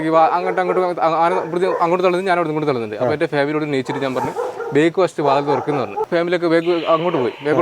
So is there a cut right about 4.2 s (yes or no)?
no